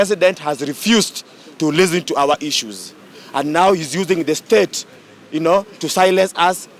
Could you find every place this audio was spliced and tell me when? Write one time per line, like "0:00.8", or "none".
none